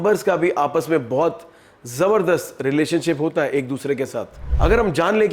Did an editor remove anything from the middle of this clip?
yes; 1 cut; at 4.4 s

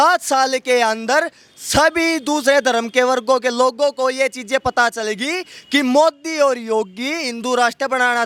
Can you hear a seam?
no; 0 cuts

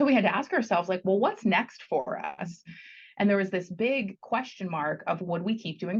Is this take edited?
no; 0 cuts

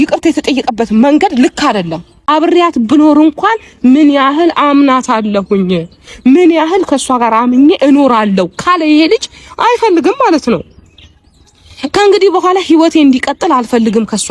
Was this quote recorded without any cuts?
no; 1 cut; at 2.2 s

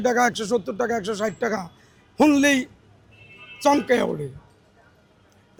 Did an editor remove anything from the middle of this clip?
no; 0 cuts

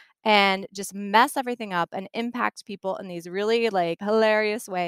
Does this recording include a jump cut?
yes; 1 cut; at 4.0 s

